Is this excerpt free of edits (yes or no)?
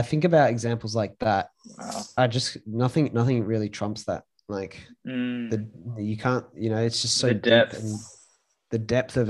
no